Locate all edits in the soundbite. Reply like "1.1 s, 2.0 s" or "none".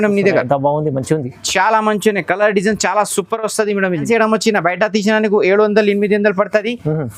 4.0 s